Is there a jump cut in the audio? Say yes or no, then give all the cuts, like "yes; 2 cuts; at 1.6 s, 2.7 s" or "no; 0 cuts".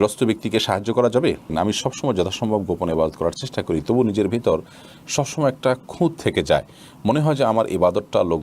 yes; 1 cut; at 1.5 s